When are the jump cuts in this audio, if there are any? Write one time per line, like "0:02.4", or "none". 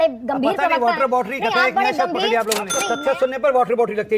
none